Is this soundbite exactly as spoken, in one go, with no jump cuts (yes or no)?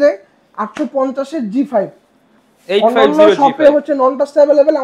yes